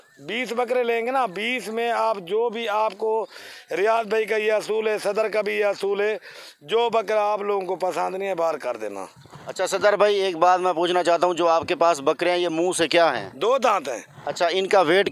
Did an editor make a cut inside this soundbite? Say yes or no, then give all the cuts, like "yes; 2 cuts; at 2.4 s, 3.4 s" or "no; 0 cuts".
no; 0 cuts